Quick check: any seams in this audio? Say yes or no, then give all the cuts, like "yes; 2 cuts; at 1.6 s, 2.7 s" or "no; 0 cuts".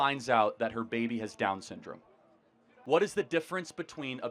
yes; 1 cut; at 2.7 s